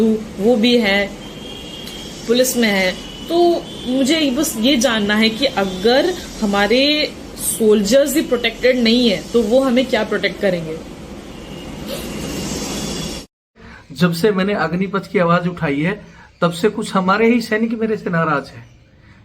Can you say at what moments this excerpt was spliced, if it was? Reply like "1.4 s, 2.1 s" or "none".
13.5 s